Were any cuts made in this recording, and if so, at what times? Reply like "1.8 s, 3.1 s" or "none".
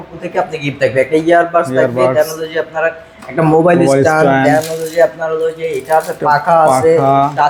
none